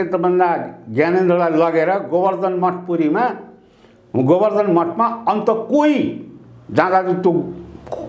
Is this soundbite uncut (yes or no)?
yes